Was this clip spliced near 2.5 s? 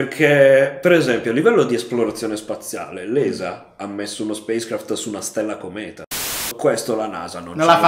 no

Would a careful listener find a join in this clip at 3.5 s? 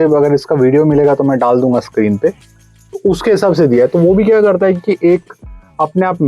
no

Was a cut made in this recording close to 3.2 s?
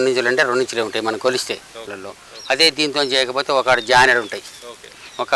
no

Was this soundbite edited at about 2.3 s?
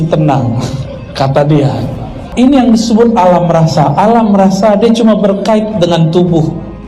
yes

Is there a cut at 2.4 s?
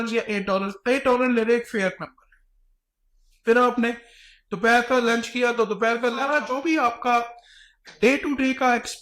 no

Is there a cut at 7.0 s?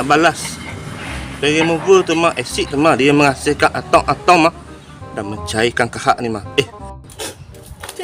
yes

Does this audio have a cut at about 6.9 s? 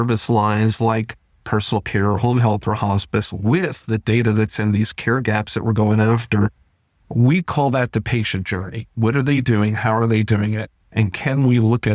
no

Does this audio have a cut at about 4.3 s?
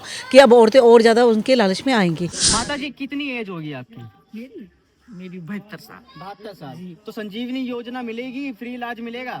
no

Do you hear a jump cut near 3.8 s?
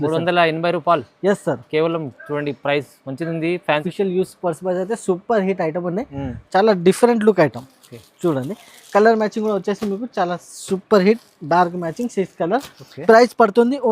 yes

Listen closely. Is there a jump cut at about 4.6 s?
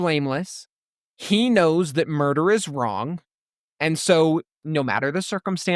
no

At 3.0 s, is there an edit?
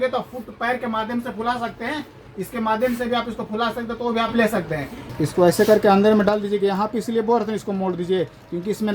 no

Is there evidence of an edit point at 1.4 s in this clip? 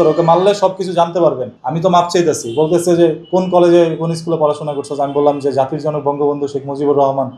yes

